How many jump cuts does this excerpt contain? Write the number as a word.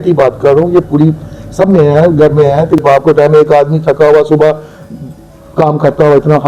one